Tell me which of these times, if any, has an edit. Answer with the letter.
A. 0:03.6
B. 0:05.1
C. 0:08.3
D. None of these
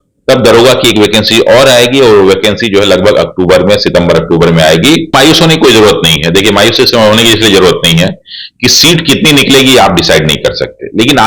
B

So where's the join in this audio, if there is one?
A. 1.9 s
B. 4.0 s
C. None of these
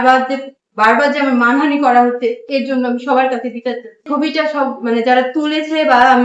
B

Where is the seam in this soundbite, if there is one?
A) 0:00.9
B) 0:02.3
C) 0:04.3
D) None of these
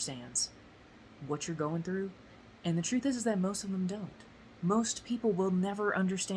B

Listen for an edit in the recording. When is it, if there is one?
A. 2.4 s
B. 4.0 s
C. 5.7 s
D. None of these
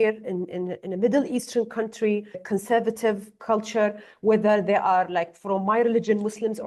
A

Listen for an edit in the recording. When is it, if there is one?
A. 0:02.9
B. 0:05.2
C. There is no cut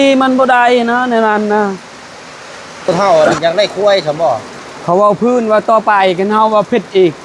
A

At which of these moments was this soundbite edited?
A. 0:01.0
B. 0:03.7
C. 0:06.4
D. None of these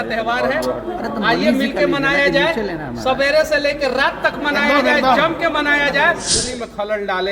C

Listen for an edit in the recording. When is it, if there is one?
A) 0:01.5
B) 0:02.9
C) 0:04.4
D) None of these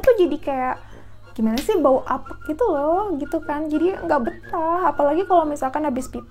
D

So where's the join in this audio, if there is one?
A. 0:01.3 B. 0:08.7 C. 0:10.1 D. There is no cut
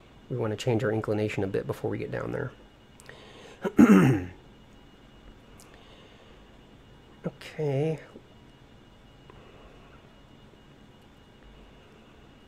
D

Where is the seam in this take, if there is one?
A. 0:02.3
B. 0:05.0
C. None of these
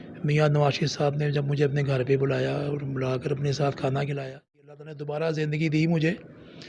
B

